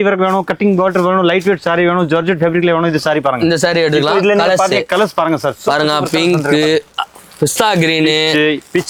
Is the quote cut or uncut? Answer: uncut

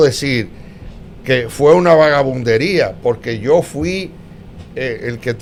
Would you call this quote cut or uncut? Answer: uncut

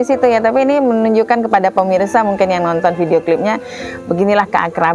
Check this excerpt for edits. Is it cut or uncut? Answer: uncut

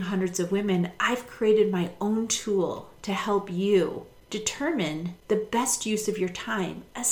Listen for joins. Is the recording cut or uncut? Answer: cut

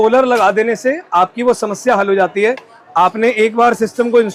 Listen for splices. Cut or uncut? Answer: uncut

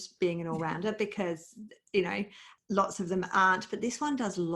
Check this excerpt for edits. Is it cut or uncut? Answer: cut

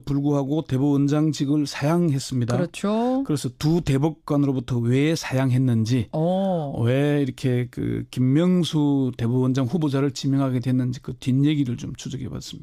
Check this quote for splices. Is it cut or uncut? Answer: cut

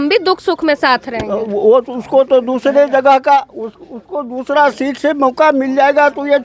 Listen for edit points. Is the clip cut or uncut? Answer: uncut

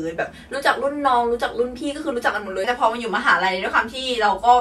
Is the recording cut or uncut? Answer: cut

